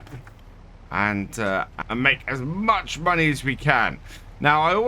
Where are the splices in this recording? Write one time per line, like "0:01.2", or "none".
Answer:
0:01.7